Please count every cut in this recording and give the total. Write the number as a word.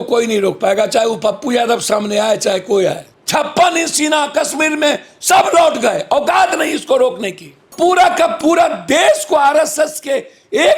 two